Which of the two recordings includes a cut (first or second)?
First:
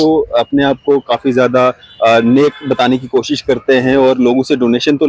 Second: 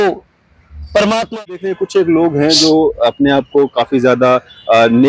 second